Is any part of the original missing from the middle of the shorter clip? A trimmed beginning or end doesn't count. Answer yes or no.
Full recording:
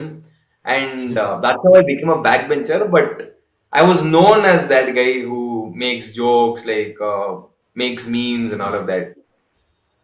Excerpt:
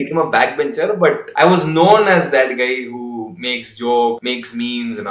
yes